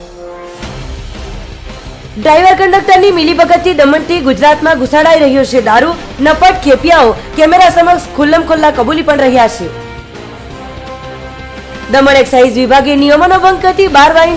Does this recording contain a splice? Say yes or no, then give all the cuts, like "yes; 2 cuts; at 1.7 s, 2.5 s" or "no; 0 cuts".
yes; 1 cut; at 2.0 s